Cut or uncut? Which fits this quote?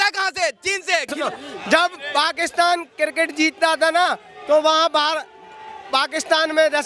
cut